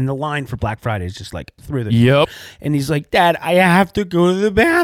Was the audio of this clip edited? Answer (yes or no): yes